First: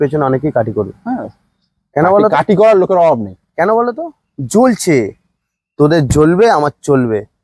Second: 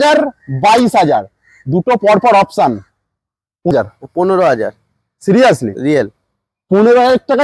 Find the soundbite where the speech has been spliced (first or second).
second